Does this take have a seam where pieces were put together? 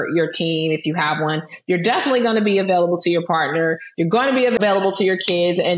yes; 1 cut; at 4.6 s

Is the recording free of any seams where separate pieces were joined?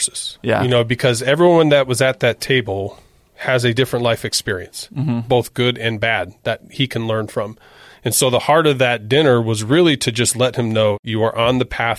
no; 2 cuts; at 5.2 s, 11.0 s

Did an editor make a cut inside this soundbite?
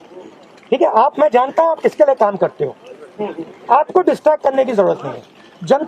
no; 0 cuts

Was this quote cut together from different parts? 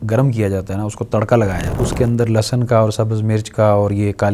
yes; 1 cut; at 1.7 s

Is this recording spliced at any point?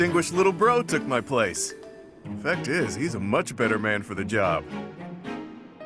yes; 1 cut; at 4.6 s

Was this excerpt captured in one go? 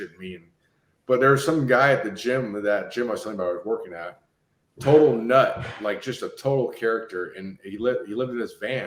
yes; 0 cuts

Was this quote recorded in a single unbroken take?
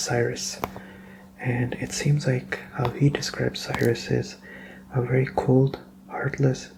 yes; 0 cuts

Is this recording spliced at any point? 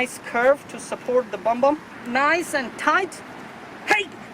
yes; 1 cut; at 1.9 s

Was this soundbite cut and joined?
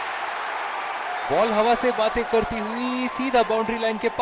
yes; 1 cut; at 1.3 s

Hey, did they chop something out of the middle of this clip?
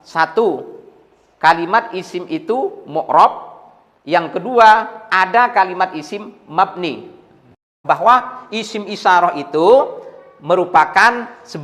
yes; 1 cut; at 7.8 s

